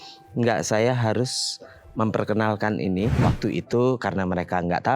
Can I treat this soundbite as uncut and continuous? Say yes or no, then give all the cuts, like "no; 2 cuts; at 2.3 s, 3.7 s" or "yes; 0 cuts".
no; 1 cut; at 3.2 s